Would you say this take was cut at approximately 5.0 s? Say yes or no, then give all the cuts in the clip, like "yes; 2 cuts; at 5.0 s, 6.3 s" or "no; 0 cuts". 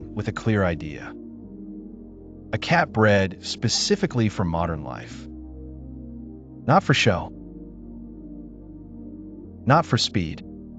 yes; 6 cuts; at 0.9 s, 2.5 s, 5.0 s, 6.2 s, 7.3 s, 9.3 s